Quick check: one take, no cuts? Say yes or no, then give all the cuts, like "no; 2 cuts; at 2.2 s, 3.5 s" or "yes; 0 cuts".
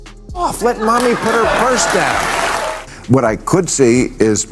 no; 1 cut; at 2.8 s